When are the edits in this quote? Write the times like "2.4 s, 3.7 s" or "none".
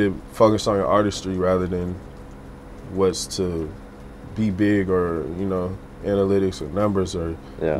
none